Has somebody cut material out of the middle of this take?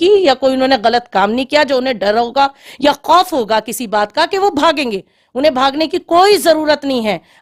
no; 0 cuts

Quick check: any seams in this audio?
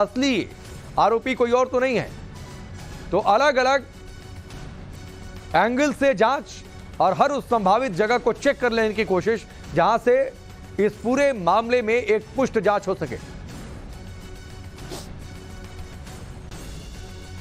no; 0 cuts

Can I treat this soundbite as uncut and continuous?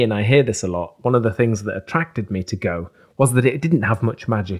yes; 0 cuts

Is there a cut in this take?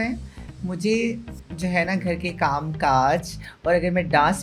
no; 0 cuts

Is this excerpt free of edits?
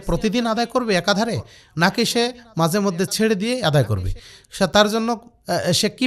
yes; 0 cuts

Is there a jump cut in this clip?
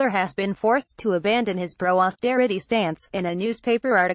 yes; 1 cut; at 3.0 s

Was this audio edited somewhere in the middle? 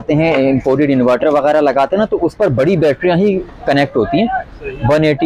no; 0 cuts

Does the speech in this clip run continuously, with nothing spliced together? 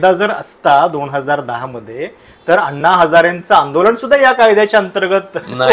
yes; 0 cuts

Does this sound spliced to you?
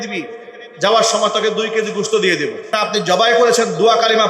yes; 1 cut; at 2.7 s

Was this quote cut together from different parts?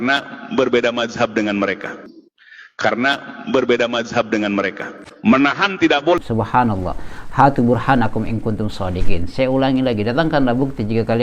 yes; 1 cut; at 6.2 s

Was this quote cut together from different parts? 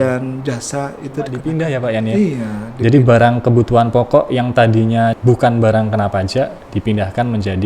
yes; 2 cuts; at 1.4 s, 5.2 s

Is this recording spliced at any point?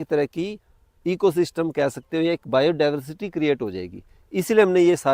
no; 0 cuts

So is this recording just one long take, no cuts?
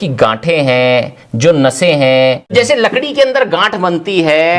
no; 1 cut; at 2.5 s

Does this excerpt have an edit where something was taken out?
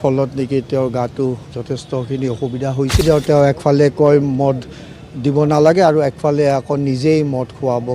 yes; 1 cut; at 3.0 s

